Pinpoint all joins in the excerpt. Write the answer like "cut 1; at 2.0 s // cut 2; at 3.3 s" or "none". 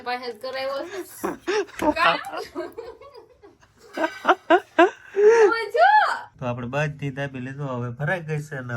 cut 1; at 6.3 s